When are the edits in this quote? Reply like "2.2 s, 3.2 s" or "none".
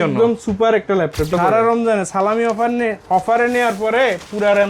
1.3 s